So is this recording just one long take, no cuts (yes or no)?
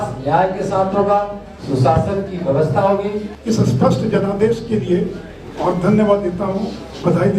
no